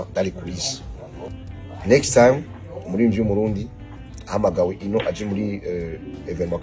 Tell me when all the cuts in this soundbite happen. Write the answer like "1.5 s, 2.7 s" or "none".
1.2 s